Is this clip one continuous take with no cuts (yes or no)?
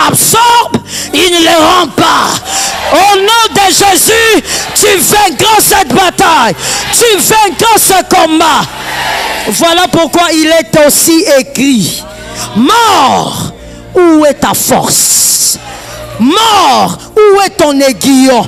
yes